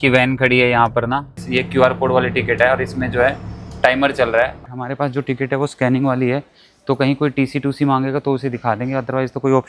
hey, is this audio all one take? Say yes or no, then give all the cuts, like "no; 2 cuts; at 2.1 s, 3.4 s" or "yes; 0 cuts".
no; 2 cuts; at 1.4 s, 4.6 s